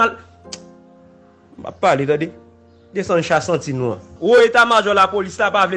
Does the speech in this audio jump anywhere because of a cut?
yes; 1 cut; at 4.1 s

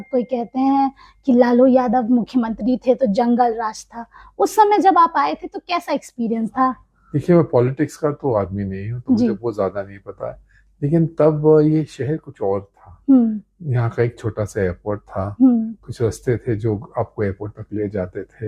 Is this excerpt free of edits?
yes; 0 cuts

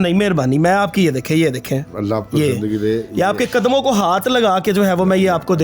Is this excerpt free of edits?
yes; 0 cuts

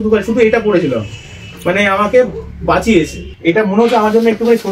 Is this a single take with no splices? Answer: no; 1 cut; at 3.3 s

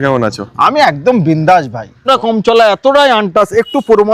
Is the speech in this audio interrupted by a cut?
yes; 1 cut; at 2.1 s

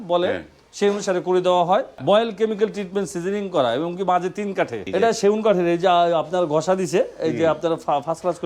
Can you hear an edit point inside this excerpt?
yes; 2 cuts; at 2.0 s, 4.8 s

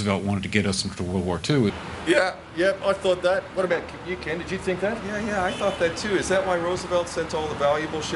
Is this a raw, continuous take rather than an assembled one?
yes; 0 cuts

